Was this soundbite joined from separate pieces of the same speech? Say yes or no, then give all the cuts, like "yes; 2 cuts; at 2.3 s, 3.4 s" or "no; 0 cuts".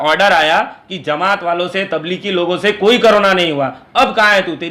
no; 0 cuts